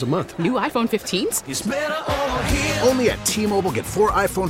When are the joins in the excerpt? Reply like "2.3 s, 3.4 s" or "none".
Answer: none